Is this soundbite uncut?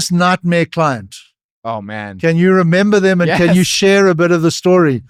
yes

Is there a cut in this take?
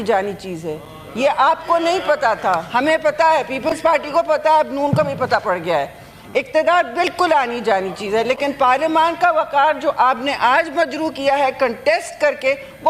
no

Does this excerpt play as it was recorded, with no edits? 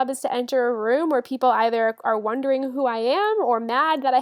yes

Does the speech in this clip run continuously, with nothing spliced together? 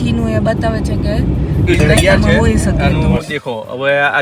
no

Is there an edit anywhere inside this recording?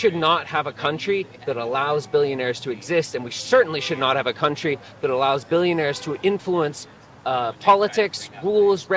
no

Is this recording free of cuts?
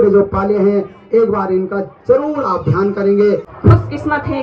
no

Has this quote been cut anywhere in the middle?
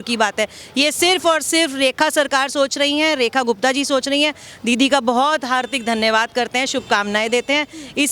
no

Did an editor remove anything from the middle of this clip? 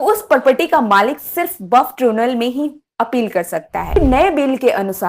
yes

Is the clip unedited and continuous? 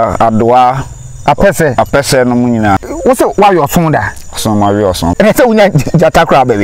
no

